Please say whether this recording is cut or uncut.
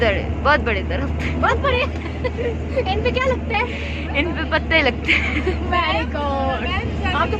uncut